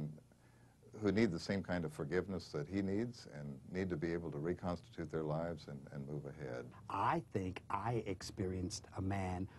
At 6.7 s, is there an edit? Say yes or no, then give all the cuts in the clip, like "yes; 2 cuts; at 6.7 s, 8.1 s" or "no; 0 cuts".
yes; 1 cut; at 6.7 s